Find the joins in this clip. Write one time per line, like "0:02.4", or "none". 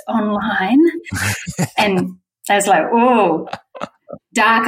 none

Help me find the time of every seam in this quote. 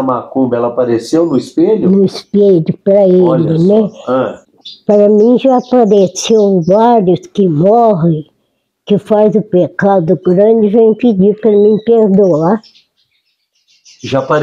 0:04.4

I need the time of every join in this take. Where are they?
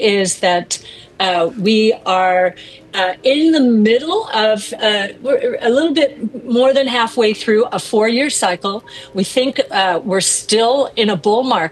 none

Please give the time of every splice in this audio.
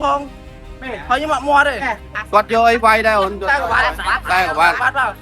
0:02.1

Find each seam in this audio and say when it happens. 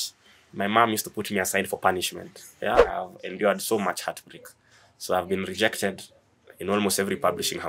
0:02.9

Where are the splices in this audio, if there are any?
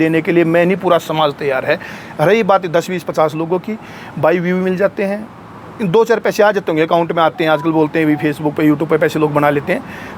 none

